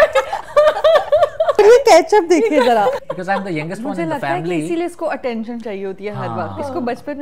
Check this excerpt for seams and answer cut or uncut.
cut